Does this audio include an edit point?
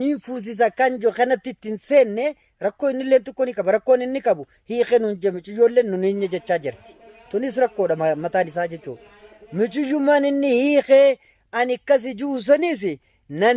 no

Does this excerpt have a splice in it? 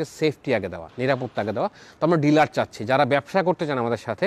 no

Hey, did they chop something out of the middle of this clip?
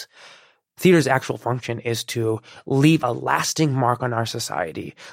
yes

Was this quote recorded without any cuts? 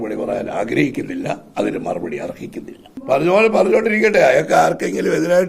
no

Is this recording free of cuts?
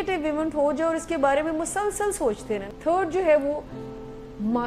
no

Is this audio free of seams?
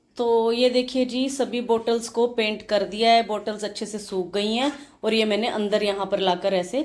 yes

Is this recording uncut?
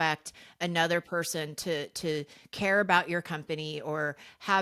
yes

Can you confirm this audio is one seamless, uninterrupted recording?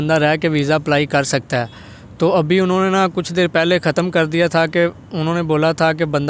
yes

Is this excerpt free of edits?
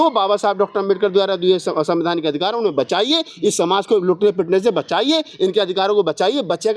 yes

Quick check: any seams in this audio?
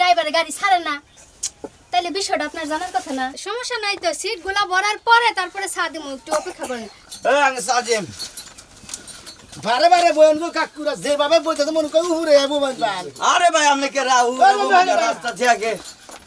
yes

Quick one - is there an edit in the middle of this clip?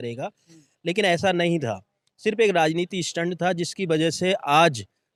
no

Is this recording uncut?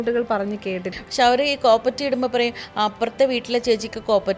no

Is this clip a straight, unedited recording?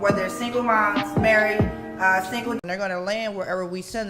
no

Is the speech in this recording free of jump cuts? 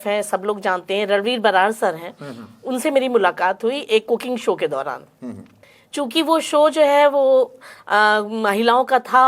yes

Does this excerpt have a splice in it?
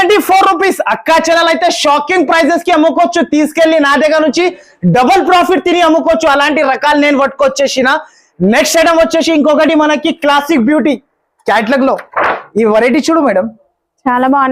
no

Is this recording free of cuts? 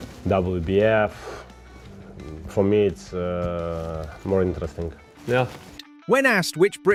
yes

